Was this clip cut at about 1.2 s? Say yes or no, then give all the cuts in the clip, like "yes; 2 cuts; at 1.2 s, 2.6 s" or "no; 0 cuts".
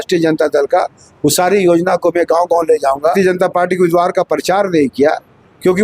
no; 1 cut; at 3.1 s